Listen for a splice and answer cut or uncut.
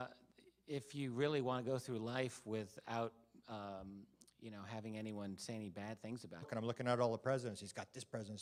uncut